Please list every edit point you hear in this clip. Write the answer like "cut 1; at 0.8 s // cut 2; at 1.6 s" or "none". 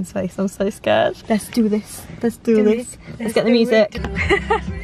cut 1; at 1.2 s // cut 2; at 3.9 s